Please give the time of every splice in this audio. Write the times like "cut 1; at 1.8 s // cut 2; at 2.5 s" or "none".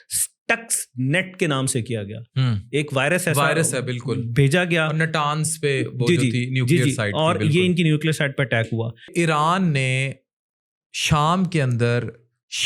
cut 1; at 9.1 s